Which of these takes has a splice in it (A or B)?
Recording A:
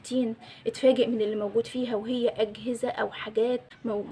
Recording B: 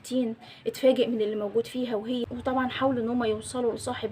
B